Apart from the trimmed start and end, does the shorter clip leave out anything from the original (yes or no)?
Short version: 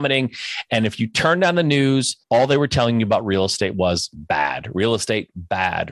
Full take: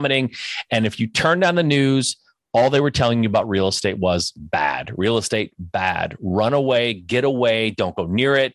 yes